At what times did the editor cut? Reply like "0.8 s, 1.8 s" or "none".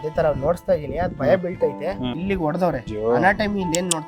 2.2 s, 2.9 s